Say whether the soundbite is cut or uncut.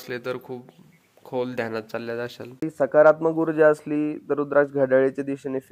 cut